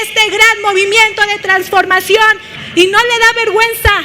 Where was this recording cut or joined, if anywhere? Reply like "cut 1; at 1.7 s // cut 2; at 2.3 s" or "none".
cut 1; at 2.5 s